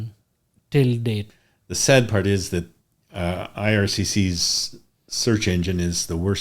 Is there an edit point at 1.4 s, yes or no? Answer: yes